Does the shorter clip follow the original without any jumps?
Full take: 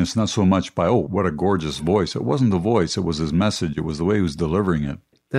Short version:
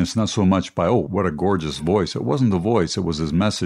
yes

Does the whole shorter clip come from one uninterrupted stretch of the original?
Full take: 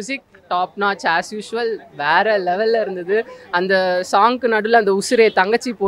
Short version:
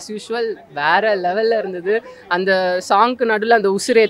yes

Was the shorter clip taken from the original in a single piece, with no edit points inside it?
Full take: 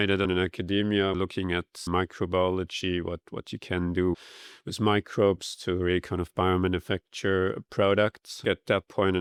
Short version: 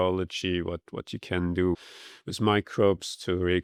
yes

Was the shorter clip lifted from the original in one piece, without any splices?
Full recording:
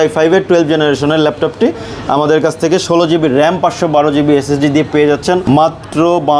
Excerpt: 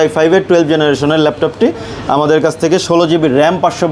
yes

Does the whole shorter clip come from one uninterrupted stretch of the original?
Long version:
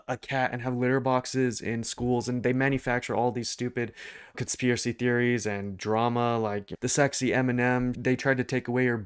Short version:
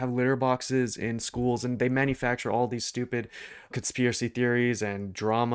yes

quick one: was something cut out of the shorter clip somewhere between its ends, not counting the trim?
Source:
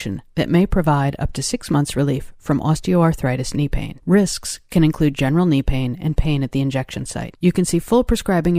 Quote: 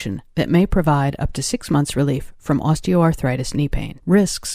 no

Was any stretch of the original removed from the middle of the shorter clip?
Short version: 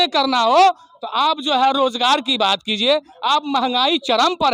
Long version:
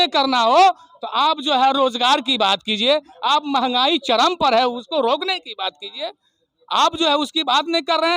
no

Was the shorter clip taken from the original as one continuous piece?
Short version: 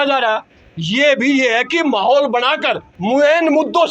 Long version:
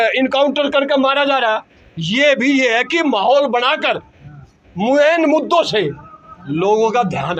no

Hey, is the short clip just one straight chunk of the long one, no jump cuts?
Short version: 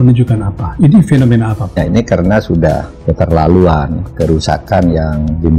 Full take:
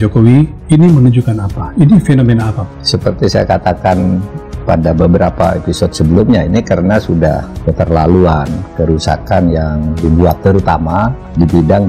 no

